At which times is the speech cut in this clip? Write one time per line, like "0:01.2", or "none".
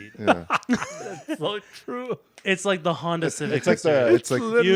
none